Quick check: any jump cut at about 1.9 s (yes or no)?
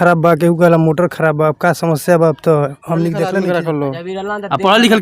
no